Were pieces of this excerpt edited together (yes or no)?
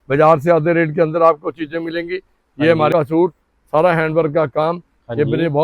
yes